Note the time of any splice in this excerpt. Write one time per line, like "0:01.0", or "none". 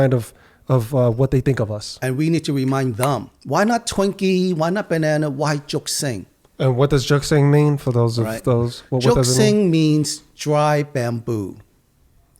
0:03.3